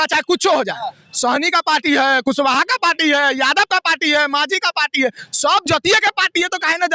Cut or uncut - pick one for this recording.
uncut